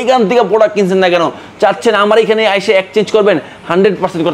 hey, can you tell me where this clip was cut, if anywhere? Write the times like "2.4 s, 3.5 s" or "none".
none